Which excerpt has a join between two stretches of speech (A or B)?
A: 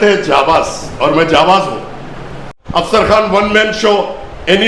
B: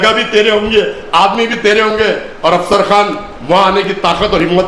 A